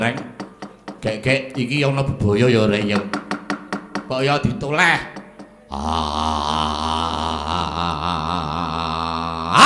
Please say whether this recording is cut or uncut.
uncut